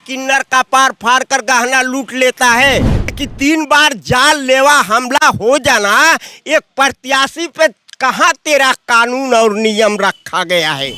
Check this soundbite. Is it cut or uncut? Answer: cut